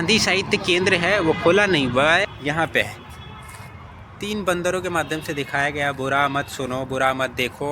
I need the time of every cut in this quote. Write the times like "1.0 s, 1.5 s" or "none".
2.2 s